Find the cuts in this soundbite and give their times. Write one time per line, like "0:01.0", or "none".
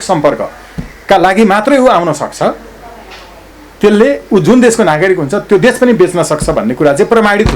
none